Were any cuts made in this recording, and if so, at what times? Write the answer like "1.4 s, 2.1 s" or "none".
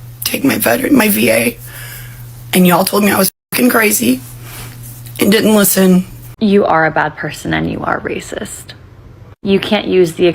6.2 s